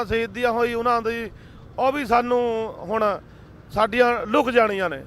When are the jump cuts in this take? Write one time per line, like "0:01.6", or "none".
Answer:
0:01.2